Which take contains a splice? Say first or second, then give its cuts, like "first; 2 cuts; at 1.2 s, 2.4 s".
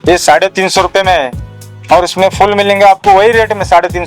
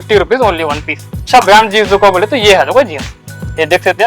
second; 1 cut; at 1.3 s